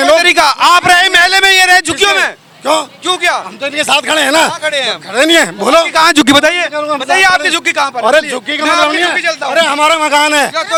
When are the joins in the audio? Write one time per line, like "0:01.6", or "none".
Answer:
none